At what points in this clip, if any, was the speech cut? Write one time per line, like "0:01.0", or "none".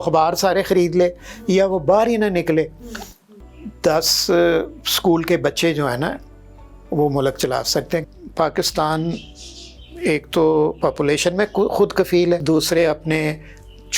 0:03.3
0:08.1
0:12.4